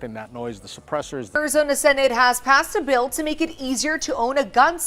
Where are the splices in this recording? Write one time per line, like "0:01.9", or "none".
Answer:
0:01.3